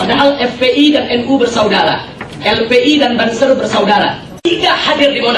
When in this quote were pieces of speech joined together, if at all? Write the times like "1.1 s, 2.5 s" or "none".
4.4 s